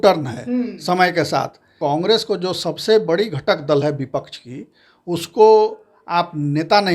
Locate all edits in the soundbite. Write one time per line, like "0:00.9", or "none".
0:01.7